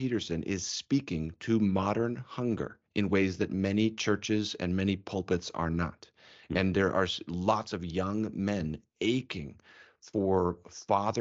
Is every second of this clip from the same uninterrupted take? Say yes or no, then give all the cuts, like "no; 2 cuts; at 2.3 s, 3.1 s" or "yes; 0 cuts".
yes; 0 cuts